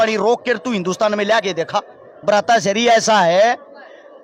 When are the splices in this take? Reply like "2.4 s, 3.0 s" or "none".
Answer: 2.1 s